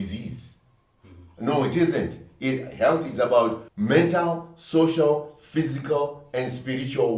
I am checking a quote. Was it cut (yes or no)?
yes